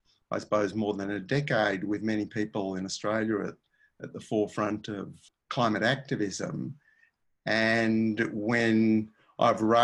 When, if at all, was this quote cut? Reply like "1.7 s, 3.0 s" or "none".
5.2 s